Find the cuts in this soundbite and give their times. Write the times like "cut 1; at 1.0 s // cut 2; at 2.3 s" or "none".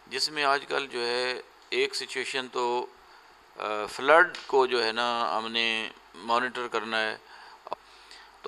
cut 1; at 7.6 s